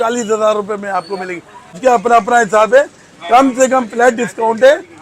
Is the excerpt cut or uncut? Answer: cut